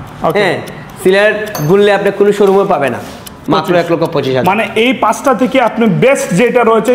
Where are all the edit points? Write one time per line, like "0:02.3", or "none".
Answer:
0:03.3

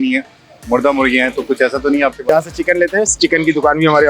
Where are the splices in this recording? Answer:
0:02.2

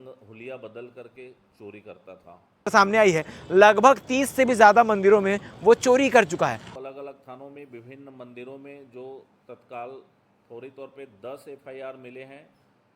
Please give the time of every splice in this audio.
0:02.7
0:06.6

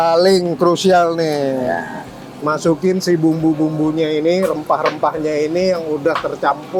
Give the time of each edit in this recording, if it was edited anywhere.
none

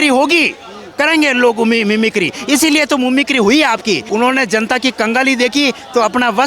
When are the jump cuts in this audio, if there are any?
0:04.0

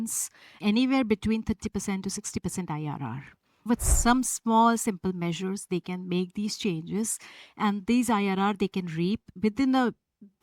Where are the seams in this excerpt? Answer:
0:03.7
0:09.3

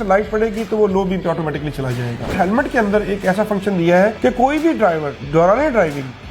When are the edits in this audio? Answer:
0:02.3
0:04.2
0:05.1

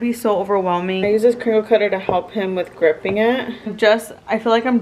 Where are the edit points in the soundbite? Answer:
0:01.0
0:03.7

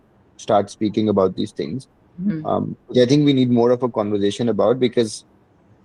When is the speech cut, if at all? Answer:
none

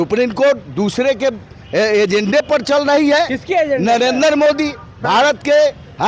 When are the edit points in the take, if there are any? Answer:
none

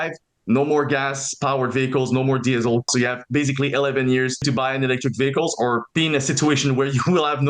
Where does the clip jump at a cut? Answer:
0:02.9
0:04.4
0:05.9

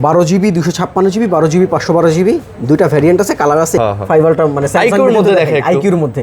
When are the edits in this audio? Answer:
0:03.8

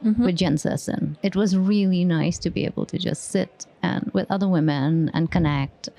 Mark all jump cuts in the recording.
0:01.1

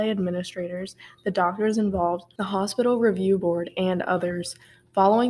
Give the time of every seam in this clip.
0:02.3

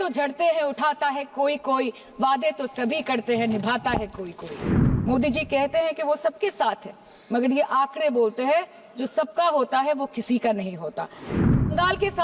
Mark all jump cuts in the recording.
0:04.5

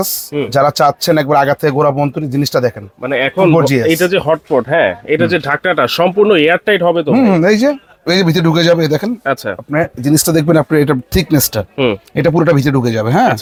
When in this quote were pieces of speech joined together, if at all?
none

